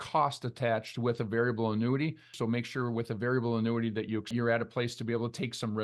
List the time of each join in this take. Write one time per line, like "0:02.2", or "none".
0:02.3
0:04.3